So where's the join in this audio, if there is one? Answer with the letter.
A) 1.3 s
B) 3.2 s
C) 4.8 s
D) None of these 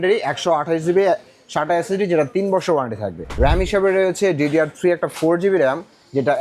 B